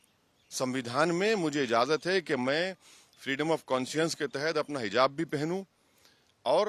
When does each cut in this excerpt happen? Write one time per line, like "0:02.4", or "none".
none